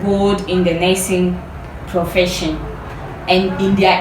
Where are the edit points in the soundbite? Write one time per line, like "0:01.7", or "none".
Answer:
0:02.9

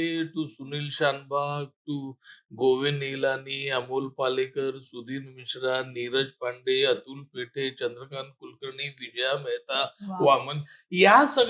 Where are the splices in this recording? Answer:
none

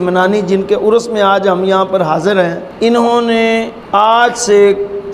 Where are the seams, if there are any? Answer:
0:02.6
0:03.8

